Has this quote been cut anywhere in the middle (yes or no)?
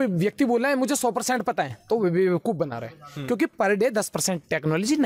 no